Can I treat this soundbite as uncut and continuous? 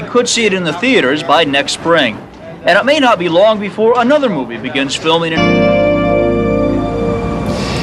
yes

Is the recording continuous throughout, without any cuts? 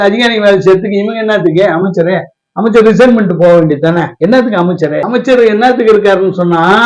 yes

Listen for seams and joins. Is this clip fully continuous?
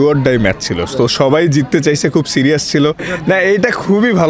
no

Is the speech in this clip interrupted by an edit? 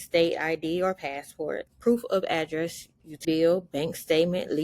yes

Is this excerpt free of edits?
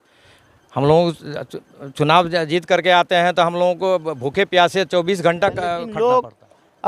no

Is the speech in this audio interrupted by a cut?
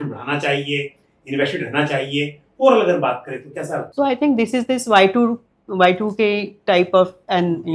yes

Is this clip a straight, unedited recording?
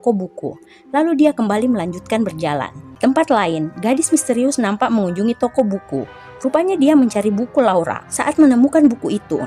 no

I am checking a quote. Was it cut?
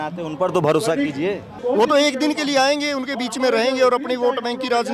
yes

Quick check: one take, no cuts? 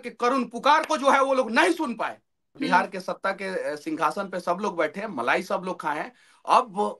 no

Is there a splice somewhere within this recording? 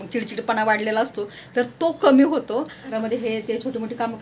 yes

